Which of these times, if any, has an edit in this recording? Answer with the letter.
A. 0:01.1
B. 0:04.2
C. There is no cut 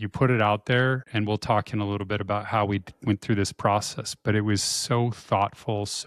A